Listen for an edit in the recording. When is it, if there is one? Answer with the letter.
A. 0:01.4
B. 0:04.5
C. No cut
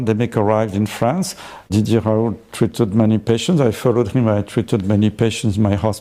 C